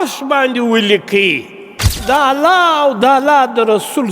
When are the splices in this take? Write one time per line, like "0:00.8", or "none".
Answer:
0:02.0